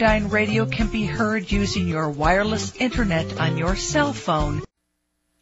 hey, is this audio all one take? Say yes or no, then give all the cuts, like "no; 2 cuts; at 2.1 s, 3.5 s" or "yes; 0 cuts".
yes; 0 cuts